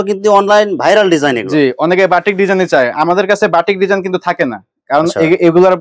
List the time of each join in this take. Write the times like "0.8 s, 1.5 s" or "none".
none